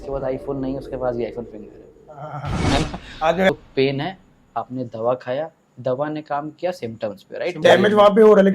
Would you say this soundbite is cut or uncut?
cut